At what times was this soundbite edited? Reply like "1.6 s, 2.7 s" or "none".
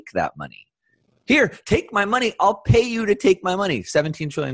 none